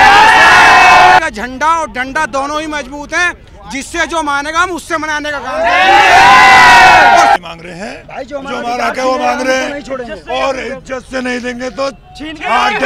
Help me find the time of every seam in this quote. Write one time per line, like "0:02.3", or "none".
0:01.2
0:07.4